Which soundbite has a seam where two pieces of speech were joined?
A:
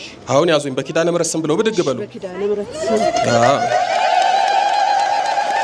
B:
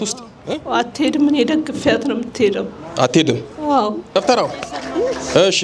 B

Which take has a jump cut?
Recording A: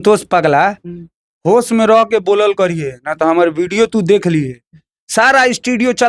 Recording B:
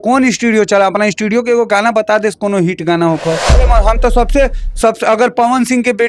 B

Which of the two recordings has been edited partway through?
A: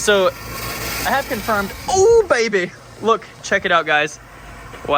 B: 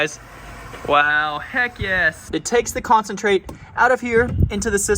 B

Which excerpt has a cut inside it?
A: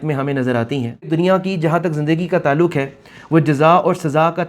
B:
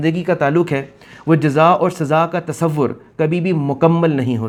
A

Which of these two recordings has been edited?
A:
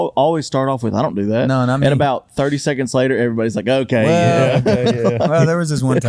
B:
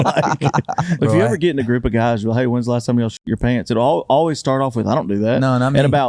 B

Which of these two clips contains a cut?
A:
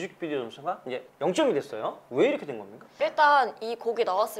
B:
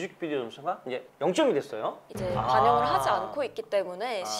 B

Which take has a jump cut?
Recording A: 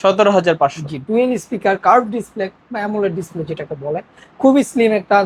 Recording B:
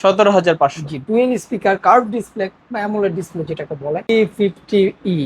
B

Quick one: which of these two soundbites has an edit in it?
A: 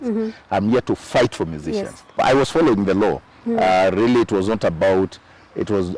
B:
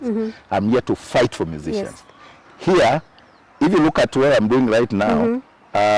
A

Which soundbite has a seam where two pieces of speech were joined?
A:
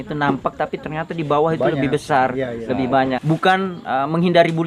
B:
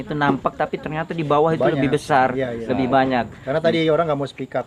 A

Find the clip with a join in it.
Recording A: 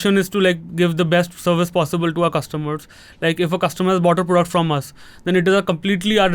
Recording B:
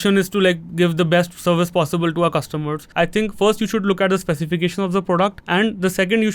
B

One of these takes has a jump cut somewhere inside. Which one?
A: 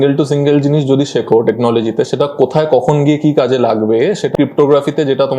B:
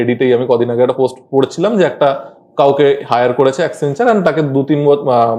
A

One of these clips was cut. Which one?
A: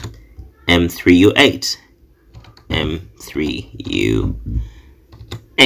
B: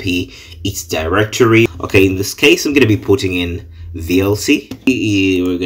B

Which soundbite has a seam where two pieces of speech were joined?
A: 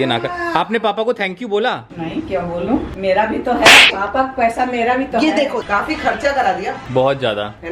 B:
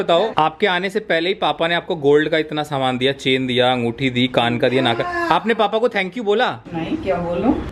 A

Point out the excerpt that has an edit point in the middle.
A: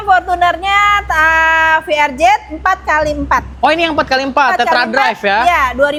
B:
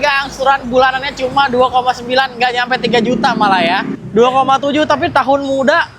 B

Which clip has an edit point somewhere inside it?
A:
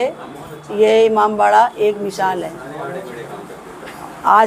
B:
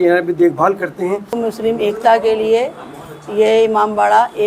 B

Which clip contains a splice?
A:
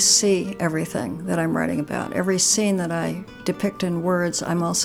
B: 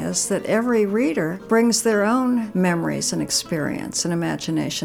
B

